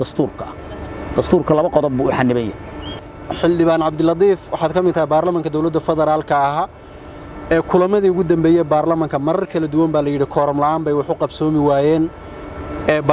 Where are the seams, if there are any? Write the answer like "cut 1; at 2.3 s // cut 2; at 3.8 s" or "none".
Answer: cut 1; at 3.0 s

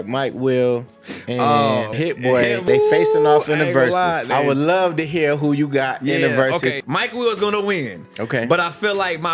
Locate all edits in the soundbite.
cut 1; at 2.4 s // cut 2; at 4.3 s // cut 3; at 6.8 s

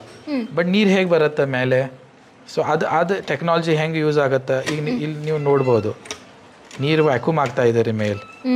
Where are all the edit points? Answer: none

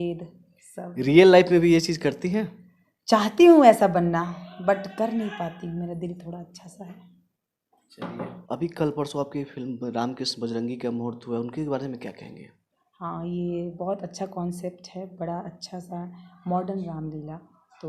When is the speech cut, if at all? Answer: none

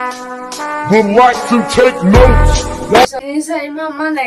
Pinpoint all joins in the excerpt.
cut 1; at 3.0 s

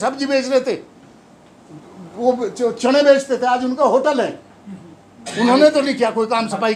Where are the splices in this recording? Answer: none

